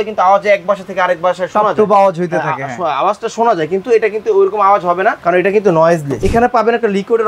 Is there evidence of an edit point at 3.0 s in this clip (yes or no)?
no